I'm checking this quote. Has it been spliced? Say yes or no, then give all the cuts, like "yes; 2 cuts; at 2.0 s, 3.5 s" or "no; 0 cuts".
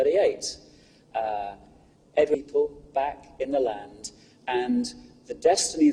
no; 0 cuts